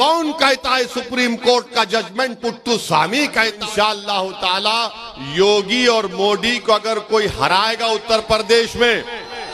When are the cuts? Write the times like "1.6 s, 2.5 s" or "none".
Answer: 3.6 s